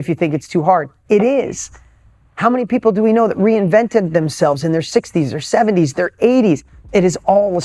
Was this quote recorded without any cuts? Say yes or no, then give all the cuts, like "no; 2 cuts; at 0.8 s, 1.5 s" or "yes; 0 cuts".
no; 1 cut; at 6.7 s